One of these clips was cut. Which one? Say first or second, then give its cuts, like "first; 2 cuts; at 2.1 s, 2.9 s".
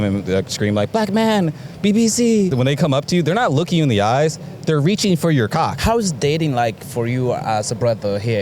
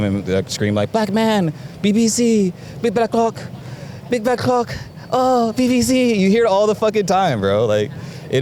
first; 2 cuts; at 2.5 s, 5.8 s